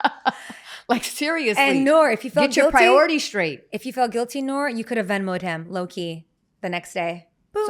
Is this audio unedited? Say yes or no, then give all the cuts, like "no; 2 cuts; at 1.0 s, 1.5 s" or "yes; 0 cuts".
yes; 0 cuts